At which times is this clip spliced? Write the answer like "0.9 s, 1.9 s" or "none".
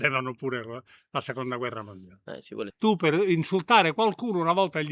2.6 s